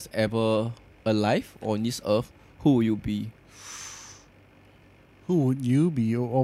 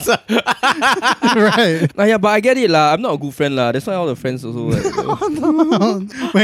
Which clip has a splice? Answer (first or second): second